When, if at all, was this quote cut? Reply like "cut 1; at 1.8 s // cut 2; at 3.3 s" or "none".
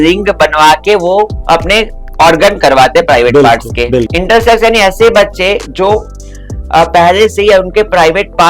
cut 1; at 4.1 s